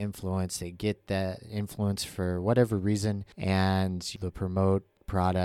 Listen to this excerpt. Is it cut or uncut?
cut